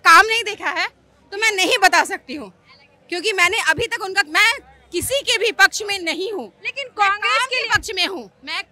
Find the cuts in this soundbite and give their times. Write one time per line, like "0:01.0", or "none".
none